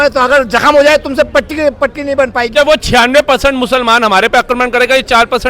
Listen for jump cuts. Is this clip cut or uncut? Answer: cut